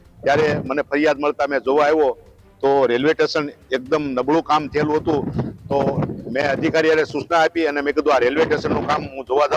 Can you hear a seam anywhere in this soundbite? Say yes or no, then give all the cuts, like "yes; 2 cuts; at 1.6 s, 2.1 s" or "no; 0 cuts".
no; 0 cuts